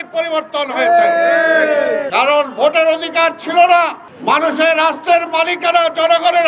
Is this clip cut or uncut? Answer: cut